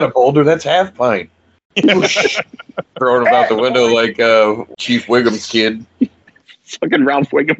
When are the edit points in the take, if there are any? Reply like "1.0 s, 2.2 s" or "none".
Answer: 4.7 s